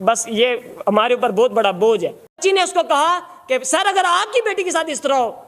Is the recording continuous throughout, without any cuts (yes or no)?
no